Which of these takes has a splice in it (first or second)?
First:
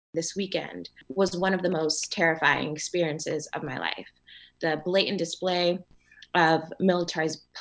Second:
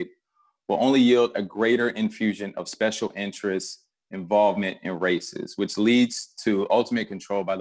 first